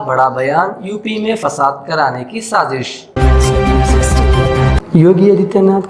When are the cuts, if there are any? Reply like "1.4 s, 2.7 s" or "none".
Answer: 3.0 s, 4.8 s

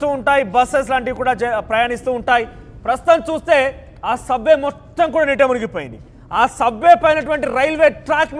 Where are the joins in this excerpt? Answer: 5.8 s

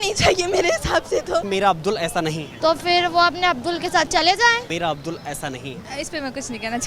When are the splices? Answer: 1.5 s, 2.5 s, 4.7 s, 5.8 s

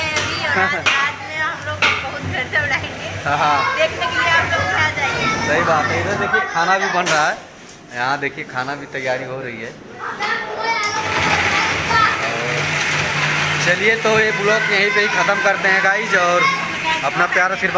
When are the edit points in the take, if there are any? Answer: none

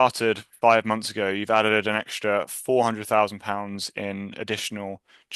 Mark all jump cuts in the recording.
none

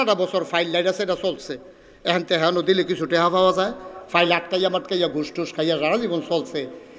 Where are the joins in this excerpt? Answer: none

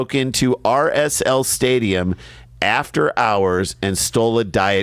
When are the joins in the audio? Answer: none

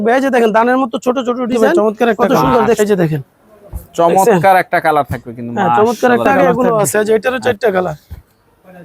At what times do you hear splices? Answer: 2.8 s, 6.3 s

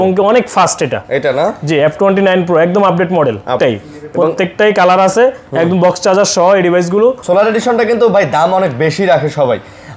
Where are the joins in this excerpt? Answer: 3.6 s, 7.2 s

